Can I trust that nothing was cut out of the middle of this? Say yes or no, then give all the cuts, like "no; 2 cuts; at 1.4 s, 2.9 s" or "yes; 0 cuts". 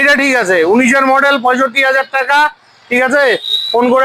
yes; 0 cuts